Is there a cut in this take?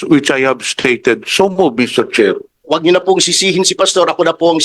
yes; 1 cut; at 2.5 s

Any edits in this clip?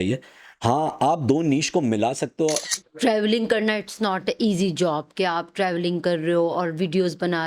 yes; 1 cut; at 2.6 s

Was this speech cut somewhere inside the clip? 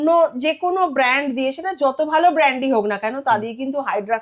no; 0 cuts

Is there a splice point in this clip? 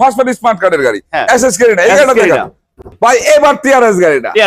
yes; 1 cut; at 2.9 s

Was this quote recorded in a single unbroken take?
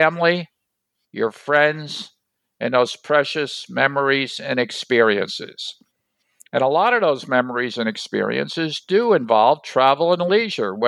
yes; 0 cuts

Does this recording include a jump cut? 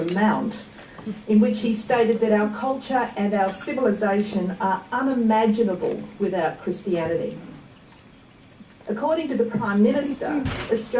no; 0 cuts

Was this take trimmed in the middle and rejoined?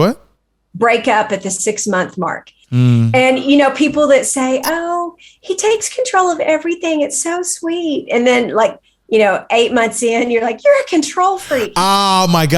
yes; 1 cut; at 2.6 s

